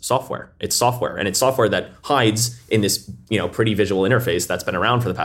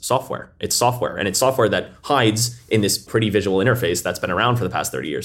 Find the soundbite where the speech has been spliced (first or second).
second